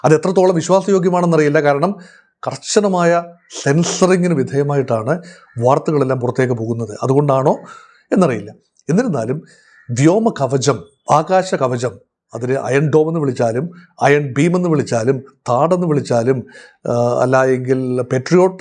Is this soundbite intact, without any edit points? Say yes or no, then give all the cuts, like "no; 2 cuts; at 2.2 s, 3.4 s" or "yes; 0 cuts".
yes; 0 cuts